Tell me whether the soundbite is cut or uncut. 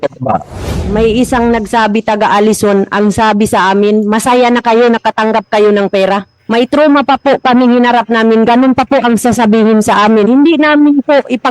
cut